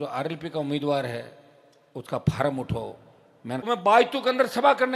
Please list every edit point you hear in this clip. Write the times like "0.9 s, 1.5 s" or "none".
3.6 s